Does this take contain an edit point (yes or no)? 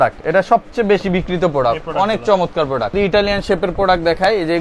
yes